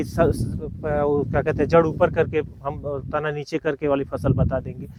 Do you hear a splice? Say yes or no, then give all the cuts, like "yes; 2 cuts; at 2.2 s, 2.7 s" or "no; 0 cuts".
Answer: no; 0 cuts